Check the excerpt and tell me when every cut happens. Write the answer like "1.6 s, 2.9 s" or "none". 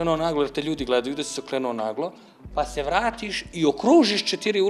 none